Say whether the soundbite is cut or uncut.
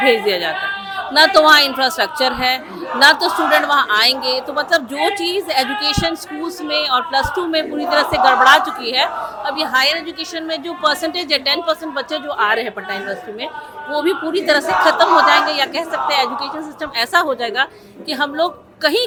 uncut